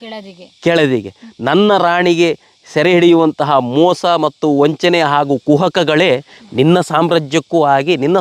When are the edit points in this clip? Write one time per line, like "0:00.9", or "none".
none